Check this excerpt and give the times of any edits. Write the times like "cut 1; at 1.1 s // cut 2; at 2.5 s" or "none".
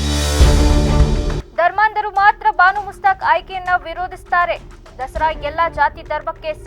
none

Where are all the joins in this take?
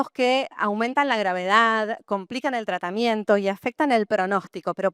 none

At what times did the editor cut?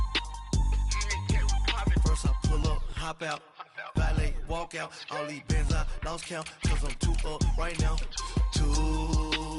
cut 1; at 1.1 s

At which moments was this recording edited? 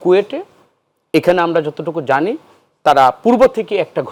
none

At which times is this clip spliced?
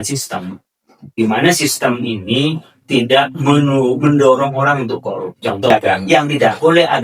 cut 1; at 5.7 s

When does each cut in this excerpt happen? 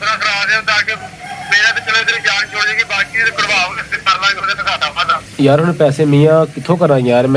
cut 1; at 5.3 s

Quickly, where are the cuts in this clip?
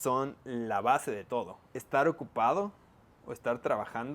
cut 1; at 1.7 s

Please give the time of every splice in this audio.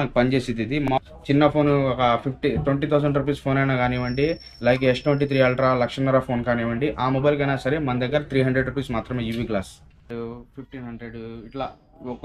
cut 1; at 0.9 s // cut 2; at 10.0 s

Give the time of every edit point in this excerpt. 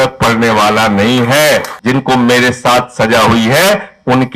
cut 1; at 1.7 s

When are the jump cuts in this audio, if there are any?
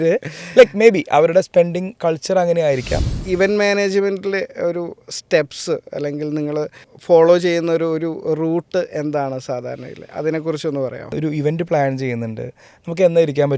cut 1; at 3.2 s // cut 2; at 11.0 s

